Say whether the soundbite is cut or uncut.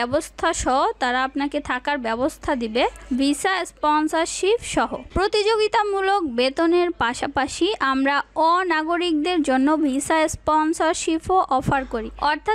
cut